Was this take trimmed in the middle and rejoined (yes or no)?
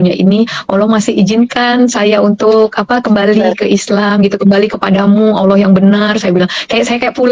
no